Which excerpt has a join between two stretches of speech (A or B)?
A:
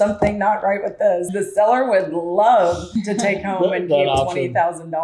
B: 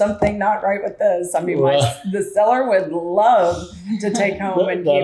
A